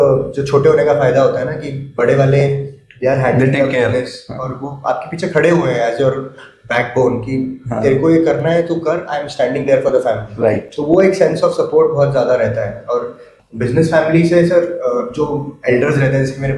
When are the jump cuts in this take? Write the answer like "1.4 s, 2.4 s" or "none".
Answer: none